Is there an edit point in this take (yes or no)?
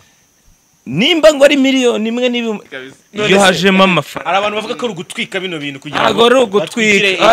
yes